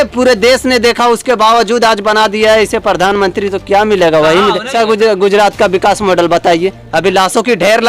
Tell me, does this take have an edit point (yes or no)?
yes